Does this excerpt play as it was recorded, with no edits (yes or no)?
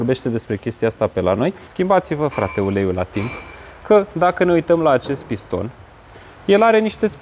no